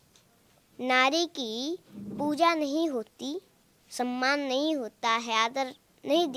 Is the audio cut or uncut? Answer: uncut